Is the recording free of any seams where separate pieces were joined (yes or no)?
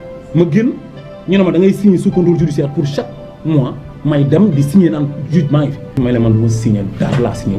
no